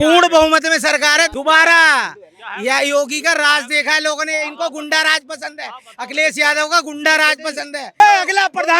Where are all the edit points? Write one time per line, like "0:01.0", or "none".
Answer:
0:01.3
0:07.8